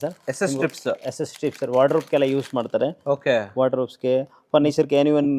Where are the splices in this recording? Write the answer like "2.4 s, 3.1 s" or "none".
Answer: none

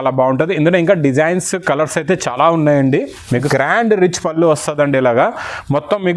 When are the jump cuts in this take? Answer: 3.4 s

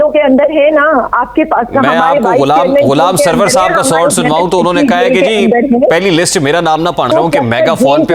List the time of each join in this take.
7.1 s

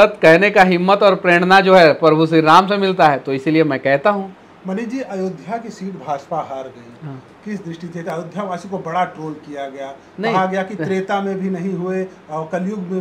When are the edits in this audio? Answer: none

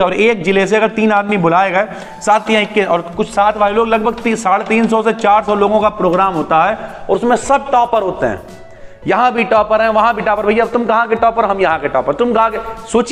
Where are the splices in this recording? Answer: none

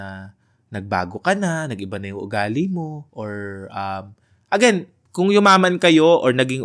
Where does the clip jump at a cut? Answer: 3.0 s, 5.0 s

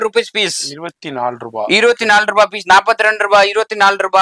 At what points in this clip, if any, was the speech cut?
none

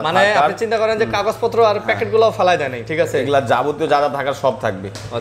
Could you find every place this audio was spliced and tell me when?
none

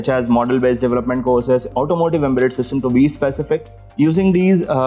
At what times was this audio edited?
1.7 s, 3.8 s

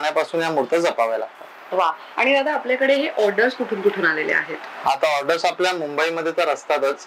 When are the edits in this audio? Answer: none

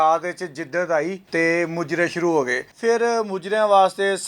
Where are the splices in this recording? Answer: 1.2 s, 2.7 s

